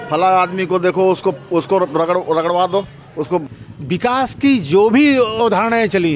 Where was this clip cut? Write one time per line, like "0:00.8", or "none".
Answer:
0:03.4